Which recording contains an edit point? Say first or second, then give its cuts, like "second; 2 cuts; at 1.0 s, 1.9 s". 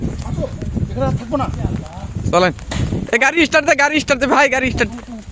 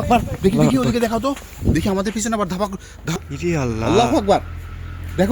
second; 1 cut; at 3.2 s